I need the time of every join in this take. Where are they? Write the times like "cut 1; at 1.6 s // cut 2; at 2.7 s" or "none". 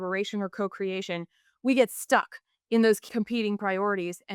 cut 1; at 3.0 s

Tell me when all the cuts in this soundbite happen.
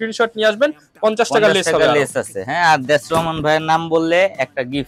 none

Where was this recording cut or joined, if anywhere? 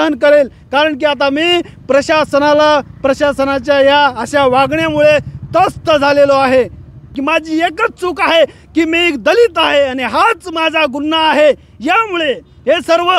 cut 1; at 7.1 s

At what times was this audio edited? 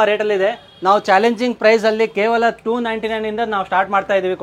none

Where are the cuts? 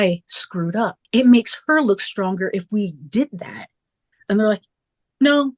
cut 1; at 1.0 s

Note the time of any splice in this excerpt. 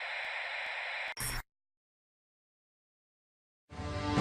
cut 1; at 1.1 s

